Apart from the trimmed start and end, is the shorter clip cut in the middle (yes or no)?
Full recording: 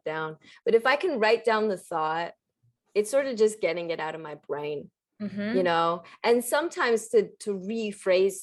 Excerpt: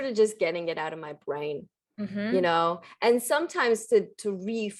no